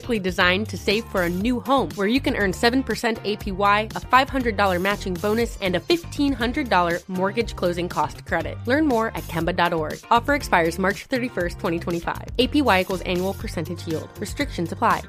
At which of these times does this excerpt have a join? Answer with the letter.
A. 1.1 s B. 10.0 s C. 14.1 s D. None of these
D